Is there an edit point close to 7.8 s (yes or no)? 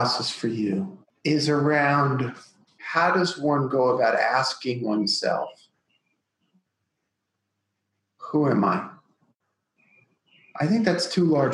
no